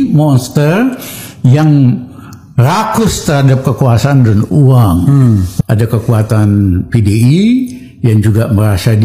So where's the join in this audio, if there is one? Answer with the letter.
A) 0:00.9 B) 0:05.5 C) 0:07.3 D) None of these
B